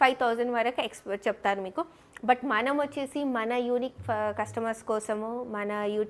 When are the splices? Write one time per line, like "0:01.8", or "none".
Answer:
none